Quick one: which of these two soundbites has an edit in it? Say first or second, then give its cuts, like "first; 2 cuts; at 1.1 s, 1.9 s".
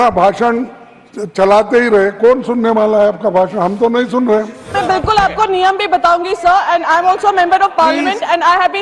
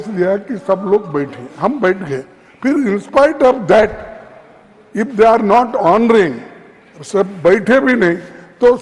first; 1 cut; at 4.7 s